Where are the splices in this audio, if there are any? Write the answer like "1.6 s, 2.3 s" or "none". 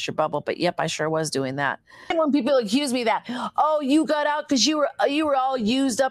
2.1 s

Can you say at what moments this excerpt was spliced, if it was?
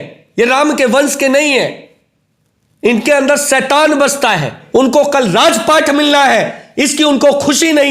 4.6 s

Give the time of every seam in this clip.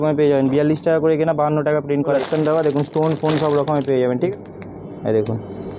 2.2 s, 4.3 s

